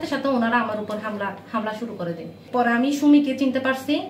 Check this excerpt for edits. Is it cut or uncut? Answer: cut